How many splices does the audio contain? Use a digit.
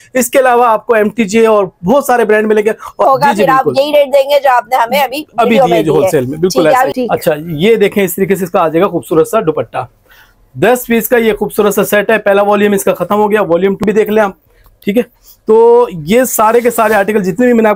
3